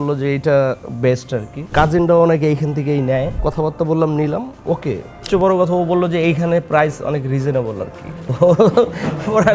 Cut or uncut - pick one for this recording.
cut